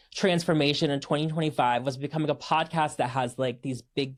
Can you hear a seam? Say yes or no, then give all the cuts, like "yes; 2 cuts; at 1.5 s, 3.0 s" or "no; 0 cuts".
no; 0 cuts